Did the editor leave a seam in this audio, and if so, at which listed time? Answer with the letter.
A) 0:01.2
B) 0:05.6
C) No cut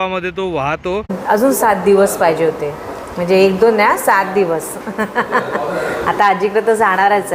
A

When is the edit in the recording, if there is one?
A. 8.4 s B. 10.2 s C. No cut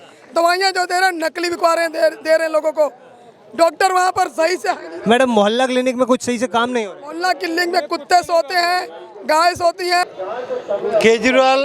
B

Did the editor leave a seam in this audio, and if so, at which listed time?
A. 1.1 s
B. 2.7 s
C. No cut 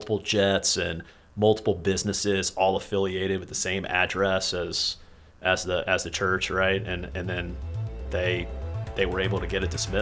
C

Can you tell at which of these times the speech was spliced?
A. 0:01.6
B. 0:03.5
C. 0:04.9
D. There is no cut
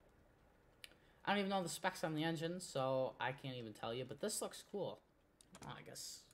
C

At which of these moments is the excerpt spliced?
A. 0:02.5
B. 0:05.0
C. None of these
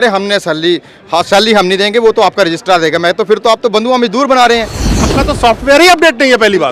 B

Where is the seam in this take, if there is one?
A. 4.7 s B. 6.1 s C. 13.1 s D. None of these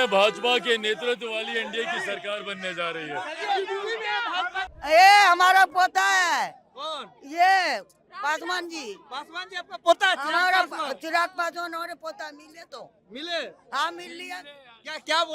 A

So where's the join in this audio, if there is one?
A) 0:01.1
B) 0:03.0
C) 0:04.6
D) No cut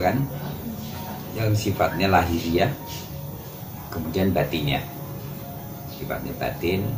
D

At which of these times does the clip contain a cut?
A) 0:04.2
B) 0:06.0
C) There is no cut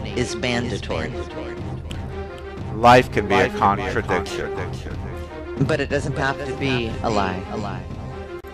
C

